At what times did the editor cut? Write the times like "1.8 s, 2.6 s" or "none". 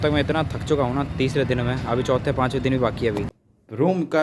3.3 s